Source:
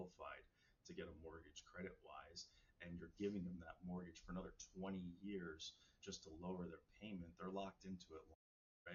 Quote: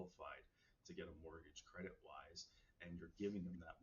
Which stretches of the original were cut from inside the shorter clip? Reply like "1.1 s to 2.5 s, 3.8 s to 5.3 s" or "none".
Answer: none